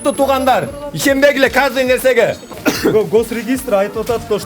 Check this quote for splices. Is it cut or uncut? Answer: cut